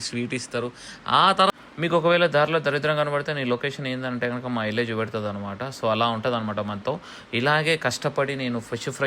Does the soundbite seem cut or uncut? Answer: cut